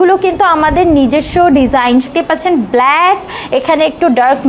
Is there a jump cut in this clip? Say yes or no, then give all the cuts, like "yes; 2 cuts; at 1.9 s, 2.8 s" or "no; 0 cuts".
yes; 1 cut; at 2.1 s